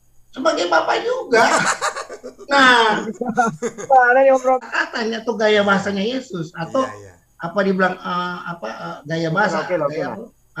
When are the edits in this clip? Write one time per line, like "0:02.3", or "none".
0:04.6